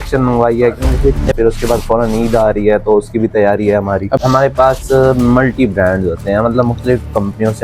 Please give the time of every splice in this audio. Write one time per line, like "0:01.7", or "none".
0:01.3
0:04.2